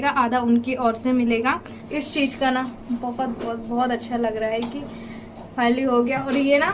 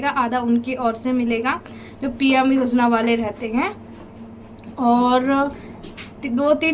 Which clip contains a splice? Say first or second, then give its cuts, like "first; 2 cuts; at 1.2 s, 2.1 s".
first; 1 cut; at 1.8 s